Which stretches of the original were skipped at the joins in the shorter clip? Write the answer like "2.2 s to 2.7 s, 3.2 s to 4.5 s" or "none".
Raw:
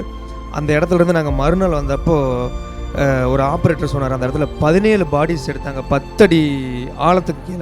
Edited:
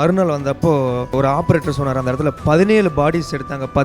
2.6 s to 3.3 s